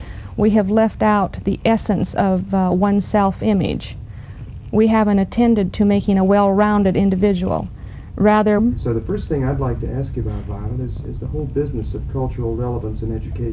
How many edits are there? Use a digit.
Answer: 0